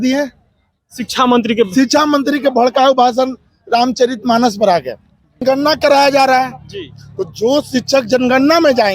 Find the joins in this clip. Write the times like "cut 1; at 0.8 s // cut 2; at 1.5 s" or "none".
cut 1; at 5.4 s